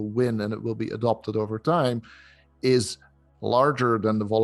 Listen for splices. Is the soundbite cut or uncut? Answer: uncut